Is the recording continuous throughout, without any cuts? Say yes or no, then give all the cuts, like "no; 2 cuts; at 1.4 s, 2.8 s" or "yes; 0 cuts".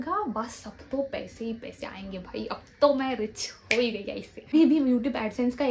no; 1 cut; at 4.5 s